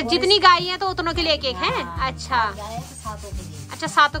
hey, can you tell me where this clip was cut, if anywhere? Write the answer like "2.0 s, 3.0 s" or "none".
none